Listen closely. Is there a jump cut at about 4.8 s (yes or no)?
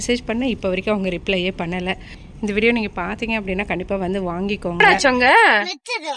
yes